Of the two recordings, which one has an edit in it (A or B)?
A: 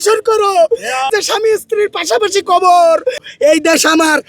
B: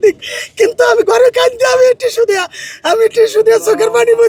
A